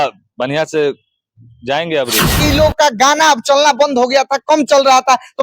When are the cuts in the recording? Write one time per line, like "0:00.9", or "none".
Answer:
0:02.4